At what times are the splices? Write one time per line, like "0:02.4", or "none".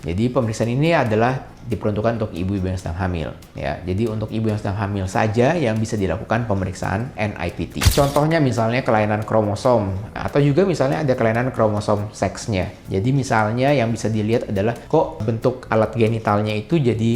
0:07.9
0:10.2
0:12.8